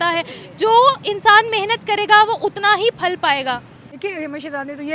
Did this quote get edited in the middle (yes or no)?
yes